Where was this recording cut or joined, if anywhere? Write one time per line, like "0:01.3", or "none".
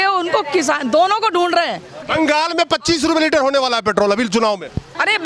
0:02.1